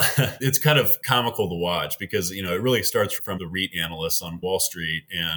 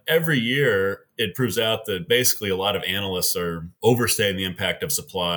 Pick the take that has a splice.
first; 2 cuts; at 1.0 s, 3.3 s

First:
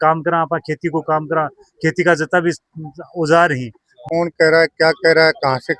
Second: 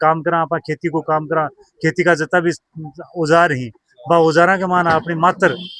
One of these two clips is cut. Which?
first; 1 cut; at 4.0 s

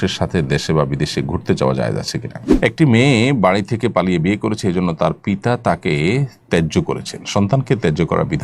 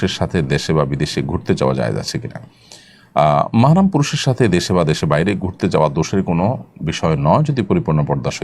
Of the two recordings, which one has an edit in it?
first; 1 cut; at 2.4 s

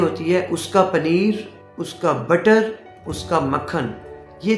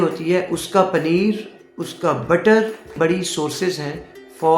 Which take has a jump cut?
second; 1 cut; at 2.9 s

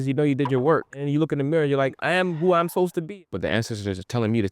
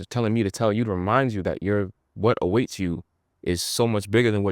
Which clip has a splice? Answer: first; 3 cuts; at 1.0 s, 2.0 s, 3.0 s

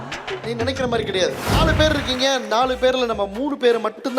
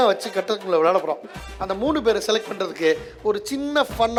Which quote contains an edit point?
first; 1 cut; at 1.5 s

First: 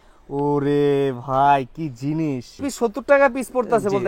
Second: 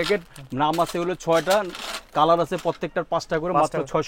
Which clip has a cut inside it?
first; 1 cut; at 2.7 s

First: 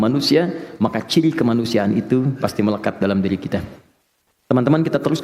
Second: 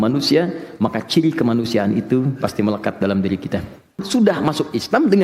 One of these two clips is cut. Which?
second; 1 cut; at 4.1 s

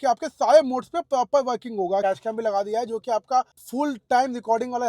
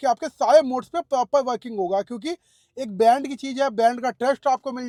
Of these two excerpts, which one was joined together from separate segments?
first; 2 cuts; at 2.0 s, 3.6 s

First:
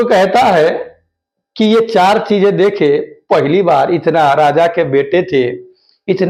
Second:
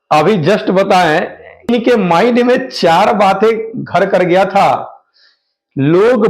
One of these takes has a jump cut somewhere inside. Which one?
second; 1 cut; at 1.7 s

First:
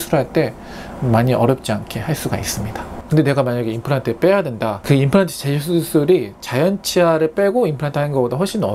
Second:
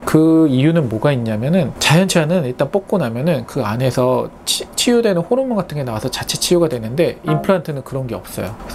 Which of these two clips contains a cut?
first; 1 cut; at 2.9 s

